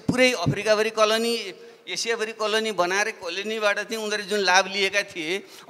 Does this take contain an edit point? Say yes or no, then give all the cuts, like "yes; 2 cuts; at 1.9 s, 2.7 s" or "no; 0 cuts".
no; 0 cuts